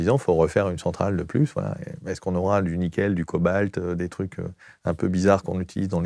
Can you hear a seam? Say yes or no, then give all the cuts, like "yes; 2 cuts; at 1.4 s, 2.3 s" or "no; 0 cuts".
no; 0 cuts